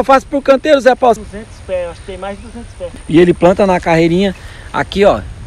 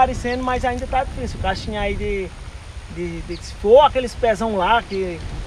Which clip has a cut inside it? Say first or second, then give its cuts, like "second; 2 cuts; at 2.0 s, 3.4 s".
first; 2 cuts; at 1.2 s, 2.8 s